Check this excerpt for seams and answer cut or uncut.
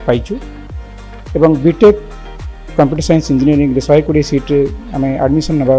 uncut